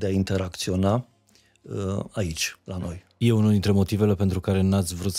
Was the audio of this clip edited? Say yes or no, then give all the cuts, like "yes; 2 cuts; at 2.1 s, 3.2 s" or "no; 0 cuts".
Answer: yes; 1 cut; at 3.0 s